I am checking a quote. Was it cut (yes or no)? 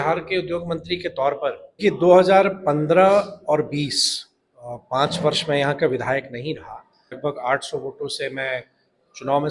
yes